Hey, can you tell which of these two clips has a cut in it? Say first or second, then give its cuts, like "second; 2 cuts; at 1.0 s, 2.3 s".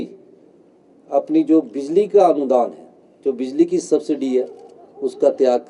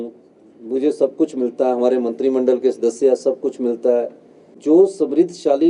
second; 1 cut; at 4.6 s